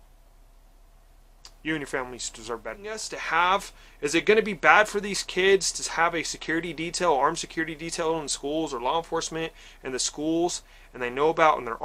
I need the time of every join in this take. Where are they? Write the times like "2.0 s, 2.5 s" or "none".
3.1 s